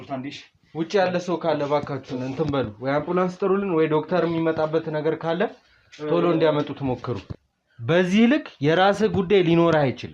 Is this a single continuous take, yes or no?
no